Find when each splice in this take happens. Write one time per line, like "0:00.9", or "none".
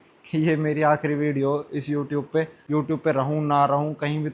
0:02.6